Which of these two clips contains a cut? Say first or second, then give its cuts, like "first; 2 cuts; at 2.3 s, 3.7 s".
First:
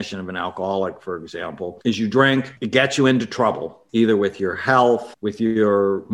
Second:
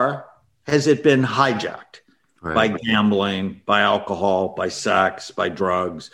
first; 4 cuts; at 1.8 s, 2.6 s, 3.7 s, 5.2 s